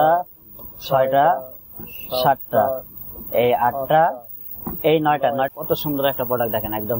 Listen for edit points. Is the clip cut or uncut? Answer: cut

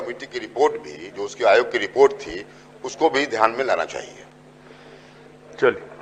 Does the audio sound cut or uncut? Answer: uncut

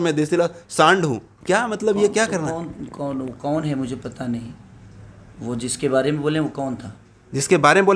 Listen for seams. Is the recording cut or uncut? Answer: uncut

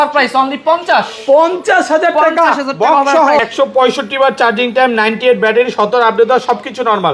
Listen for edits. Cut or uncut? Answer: cut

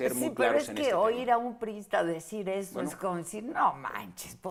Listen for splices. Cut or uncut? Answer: uncut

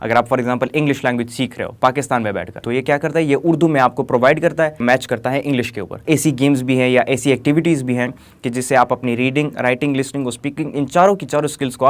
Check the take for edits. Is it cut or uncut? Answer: cut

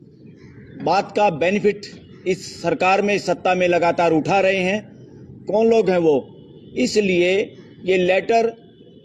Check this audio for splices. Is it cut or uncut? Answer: uncut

